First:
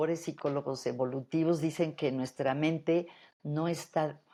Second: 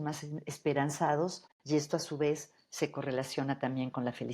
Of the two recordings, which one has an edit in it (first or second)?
second